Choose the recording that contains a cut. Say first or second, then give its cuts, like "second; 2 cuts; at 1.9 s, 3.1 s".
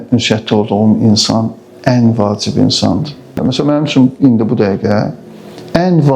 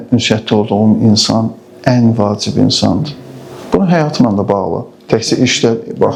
first; 1 cut; at 3.4 s